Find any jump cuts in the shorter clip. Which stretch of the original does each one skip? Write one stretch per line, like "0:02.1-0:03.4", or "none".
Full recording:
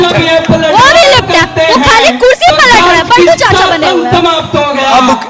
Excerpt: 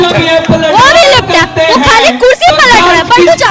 none